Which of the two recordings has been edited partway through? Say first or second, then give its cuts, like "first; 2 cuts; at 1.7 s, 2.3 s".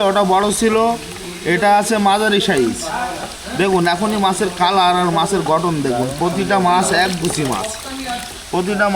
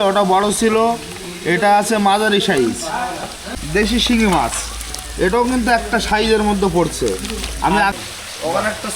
second; 2 cuts; at 3.4 s, 7.9 s